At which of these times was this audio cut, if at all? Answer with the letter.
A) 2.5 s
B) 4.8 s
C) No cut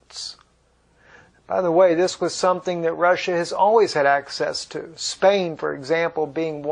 A